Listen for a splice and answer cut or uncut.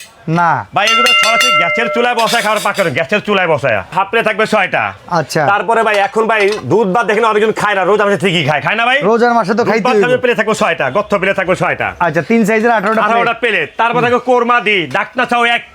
cut